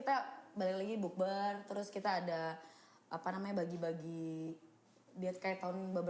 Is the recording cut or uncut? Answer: uncut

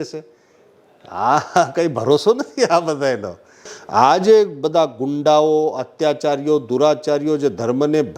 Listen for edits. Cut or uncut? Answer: cut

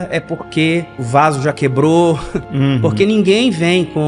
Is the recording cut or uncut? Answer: cut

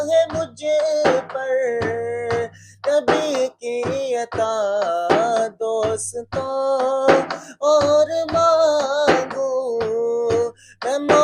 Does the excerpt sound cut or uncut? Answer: uncut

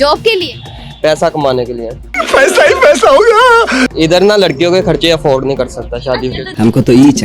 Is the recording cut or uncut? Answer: cut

